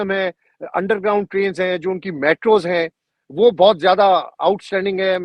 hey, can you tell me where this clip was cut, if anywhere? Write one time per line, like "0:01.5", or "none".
none